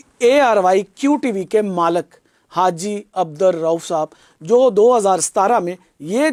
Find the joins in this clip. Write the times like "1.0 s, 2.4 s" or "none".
none